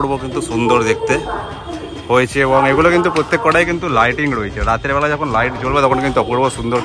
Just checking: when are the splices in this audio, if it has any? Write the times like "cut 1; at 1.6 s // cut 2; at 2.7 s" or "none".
none